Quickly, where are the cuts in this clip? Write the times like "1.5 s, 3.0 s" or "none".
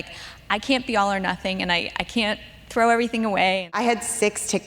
3.7 s